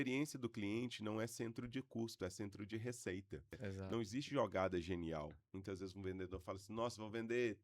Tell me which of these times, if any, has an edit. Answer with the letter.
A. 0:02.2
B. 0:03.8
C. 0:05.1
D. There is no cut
B